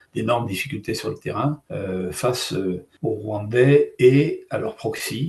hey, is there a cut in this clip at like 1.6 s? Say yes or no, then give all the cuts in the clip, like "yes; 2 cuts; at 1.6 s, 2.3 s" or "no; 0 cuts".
yes; 2 cuts; at 1.6 s, 2.9 s